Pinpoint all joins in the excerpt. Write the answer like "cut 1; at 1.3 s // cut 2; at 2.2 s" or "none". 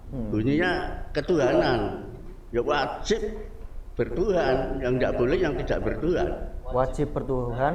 none